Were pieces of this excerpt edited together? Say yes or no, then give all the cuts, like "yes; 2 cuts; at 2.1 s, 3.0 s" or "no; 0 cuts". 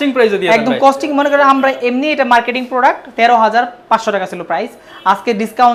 no; 0 cuts